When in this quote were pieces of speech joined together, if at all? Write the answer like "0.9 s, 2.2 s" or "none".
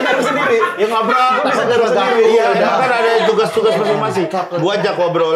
none